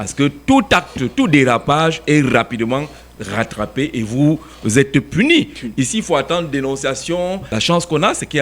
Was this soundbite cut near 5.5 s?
no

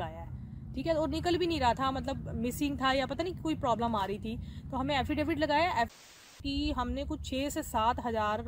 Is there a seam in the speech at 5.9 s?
yes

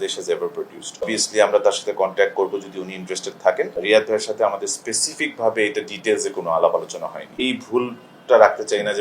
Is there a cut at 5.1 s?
no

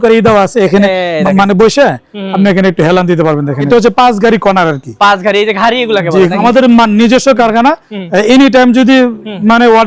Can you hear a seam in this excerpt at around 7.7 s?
no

